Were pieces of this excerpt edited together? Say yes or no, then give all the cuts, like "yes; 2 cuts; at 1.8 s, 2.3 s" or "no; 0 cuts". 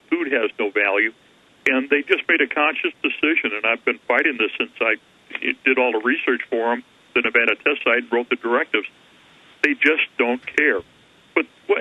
yes; 1 cut; at 4.0 s